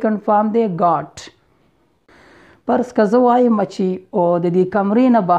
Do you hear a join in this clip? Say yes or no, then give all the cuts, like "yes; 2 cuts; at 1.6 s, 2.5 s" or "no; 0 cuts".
yes; 1 cut; at 2.1 s